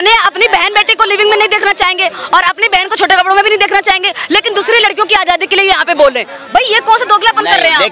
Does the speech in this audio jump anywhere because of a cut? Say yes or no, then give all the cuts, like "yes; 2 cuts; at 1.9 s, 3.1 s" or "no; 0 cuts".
no; 0 cuts